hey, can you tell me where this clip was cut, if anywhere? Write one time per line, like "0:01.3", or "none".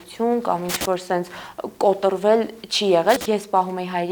0:03.2